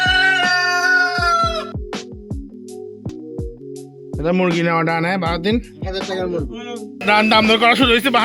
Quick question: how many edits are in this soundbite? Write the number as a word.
two